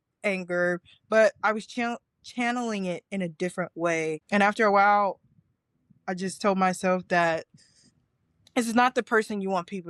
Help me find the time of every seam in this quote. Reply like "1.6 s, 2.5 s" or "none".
none